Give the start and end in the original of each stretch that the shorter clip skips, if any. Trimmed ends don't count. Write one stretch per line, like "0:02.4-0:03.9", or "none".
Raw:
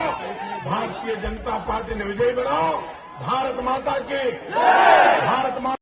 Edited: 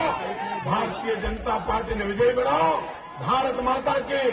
none